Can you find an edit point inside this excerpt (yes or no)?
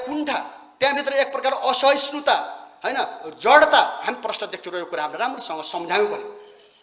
no